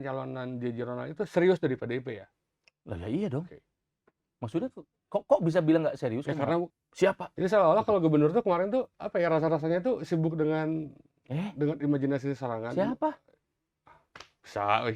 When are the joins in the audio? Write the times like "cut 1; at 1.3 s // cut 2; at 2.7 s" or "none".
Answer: cut 1; at 6.8 s